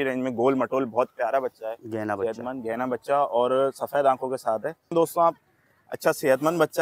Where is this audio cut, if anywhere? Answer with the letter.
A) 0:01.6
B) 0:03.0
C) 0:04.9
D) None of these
C